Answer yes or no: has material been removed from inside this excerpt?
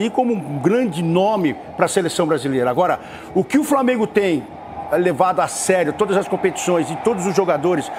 no